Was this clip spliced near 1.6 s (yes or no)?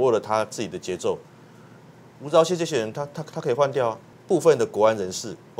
no